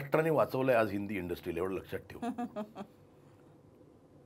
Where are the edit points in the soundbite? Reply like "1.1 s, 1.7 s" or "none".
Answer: none